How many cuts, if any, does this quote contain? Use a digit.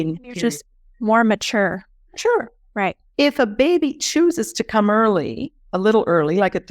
2